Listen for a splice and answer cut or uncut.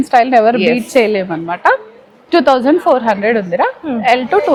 uncut